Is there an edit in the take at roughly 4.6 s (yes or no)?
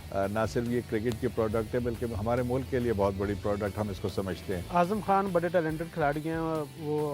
yes